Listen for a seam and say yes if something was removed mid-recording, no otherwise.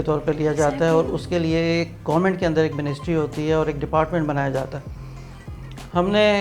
no